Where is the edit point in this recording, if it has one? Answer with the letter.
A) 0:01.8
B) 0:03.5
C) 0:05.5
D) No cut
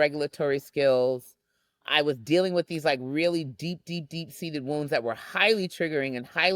A